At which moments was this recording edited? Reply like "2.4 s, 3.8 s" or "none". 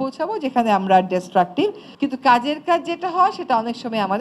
1.9 s